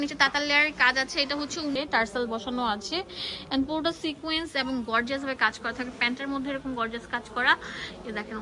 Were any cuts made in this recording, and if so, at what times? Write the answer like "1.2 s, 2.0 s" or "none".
1.8 s